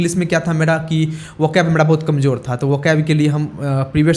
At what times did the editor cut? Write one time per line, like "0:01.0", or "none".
none